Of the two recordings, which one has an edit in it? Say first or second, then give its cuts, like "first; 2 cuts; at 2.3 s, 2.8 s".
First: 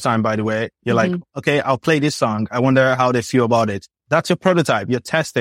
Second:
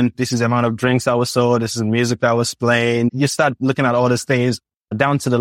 first; 2 cuts; at 1.0 s, 4.0 s